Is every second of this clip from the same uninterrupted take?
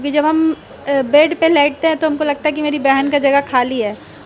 yes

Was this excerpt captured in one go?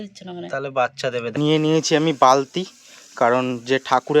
no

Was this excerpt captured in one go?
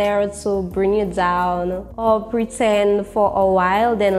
no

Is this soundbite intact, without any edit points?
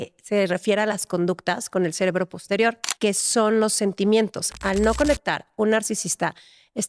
no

